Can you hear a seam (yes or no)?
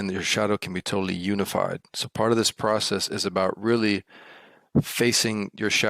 no